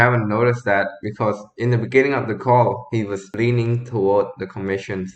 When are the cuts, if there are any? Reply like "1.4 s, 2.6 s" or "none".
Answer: none